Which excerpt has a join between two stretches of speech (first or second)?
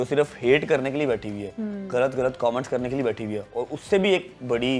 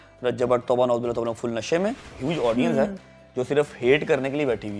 second